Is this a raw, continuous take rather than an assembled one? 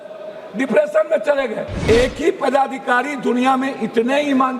no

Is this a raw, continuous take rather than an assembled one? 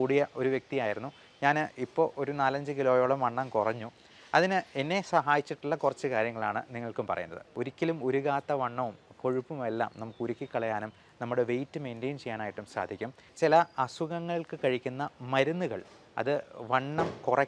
no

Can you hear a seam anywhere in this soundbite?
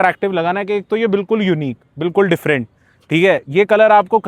no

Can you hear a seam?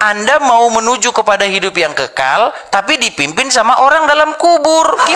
no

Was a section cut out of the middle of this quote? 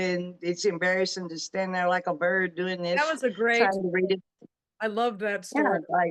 no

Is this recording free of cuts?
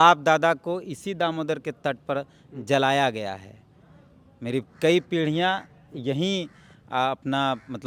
yes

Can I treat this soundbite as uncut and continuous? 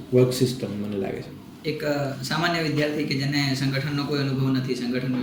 yes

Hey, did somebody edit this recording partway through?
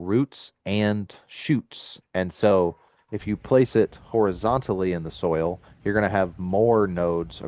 no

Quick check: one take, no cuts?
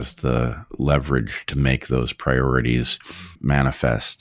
no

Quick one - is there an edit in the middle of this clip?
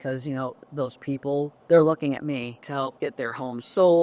yes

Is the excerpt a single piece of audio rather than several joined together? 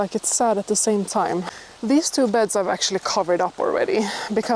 yes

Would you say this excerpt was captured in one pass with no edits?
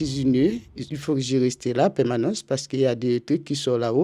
yes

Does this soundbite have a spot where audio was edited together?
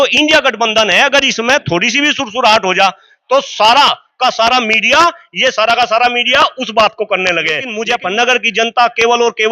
yes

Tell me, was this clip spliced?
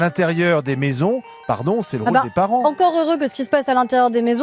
no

